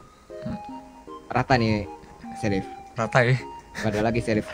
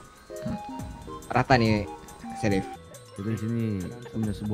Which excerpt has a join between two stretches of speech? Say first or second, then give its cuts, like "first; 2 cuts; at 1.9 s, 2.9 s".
second; 1 cut; at 2.8 s